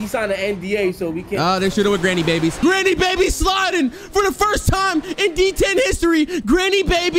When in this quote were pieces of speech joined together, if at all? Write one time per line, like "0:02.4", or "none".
0:02.6

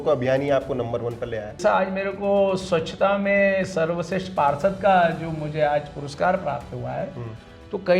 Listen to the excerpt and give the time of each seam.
0:01.5

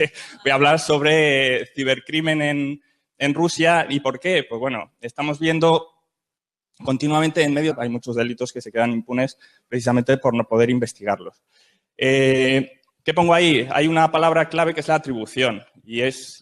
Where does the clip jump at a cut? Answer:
none

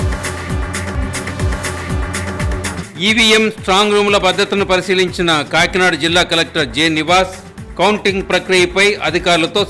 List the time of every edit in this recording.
0:02.8

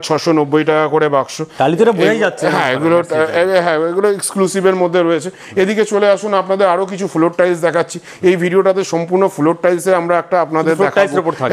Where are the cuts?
none

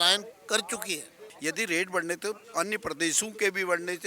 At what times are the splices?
0:01.2

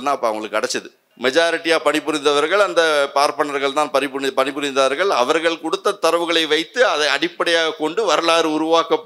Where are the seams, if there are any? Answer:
0:01.0

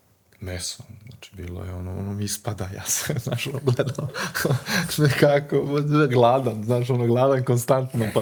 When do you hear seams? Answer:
none

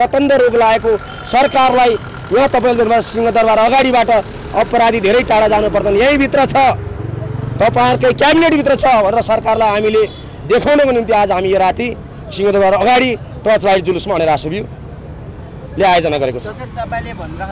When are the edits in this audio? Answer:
none

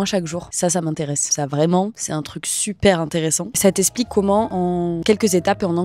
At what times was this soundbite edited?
none

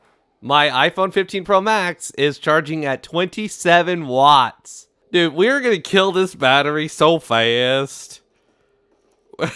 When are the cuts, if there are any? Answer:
none

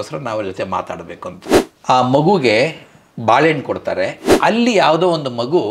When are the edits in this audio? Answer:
0:01.5
0:04.2

